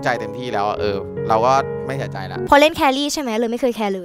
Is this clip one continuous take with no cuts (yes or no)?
no